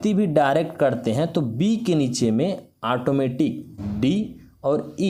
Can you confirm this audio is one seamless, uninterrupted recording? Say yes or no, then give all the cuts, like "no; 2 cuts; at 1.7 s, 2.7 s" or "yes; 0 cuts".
yes; 0 cuts